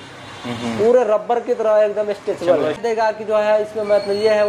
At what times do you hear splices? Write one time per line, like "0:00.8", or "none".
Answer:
0:02.8